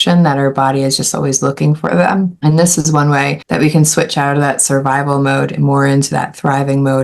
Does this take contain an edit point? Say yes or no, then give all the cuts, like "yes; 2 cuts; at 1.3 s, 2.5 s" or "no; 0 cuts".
yes; 2 cuts; at 2.3 s, 3.4 s